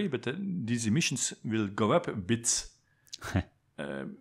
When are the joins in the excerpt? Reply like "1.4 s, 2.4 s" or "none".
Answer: none